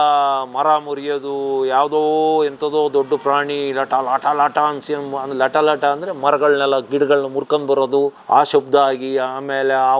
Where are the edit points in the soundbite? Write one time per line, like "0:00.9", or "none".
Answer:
none